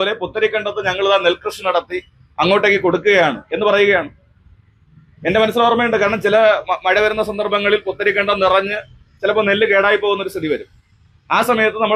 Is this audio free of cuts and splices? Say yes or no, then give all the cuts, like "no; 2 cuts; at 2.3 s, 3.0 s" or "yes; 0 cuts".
yes; 0 cuts